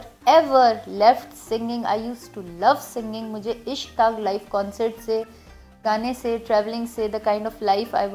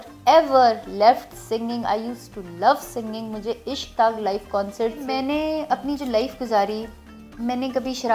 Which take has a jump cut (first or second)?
second